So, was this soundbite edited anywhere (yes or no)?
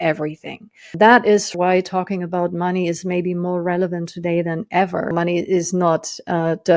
yes